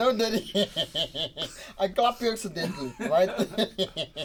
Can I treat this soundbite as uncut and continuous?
yes; 0 cuts

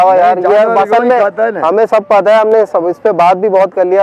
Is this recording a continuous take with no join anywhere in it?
yes; 0 cuts

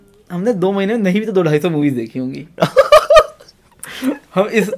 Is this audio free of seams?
yes; 0 cuts

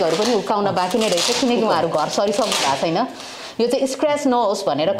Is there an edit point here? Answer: no; 0 cuts

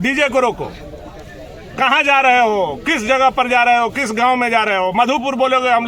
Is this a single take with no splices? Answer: yes; 0 cuts

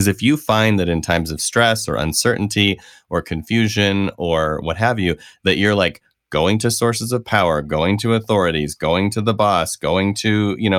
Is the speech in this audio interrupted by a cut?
no; 0 cuts

